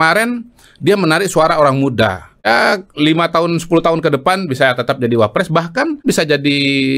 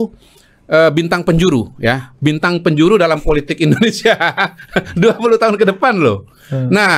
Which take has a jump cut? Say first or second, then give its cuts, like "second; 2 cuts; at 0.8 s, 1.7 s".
first; 2 cuts; at 2.5 s, 6.0 s